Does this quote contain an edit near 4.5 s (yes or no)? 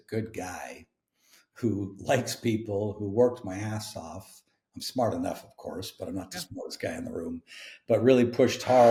no